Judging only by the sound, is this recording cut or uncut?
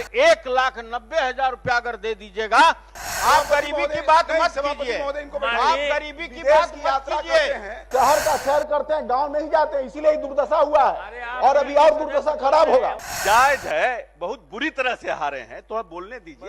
cut